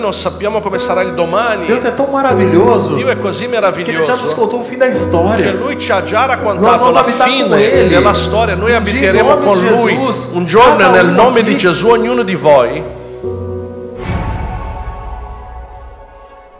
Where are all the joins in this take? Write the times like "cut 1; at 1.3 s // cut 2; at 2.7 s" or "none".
cut 1; at 14.2 s